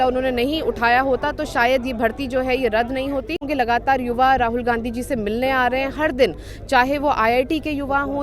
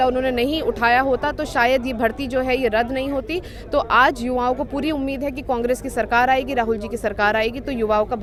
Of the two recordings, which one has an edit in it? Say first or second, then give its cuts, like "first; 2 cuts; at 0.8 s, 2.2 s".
first; 1 cut; at 3.5 s